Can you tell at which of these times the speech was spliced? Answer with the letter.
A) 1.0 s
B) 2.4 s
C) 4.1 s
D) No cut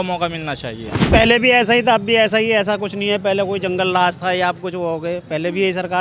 A